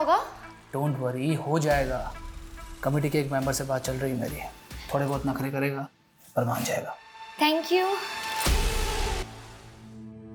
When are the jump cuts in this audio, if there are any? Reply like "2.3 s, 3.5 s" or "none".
none

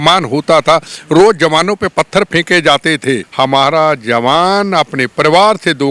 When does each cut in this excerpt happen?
3.3 s

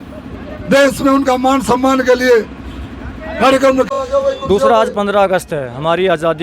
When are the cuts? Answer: 3.9 s

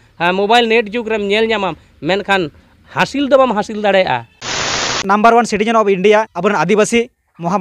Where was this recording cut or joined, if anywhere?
4.9 s, 6.3 s

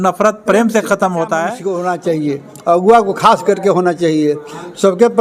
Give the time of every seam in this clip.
1.6 s

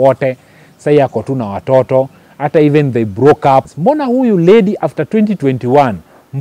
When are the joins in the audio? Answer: 3.7 s

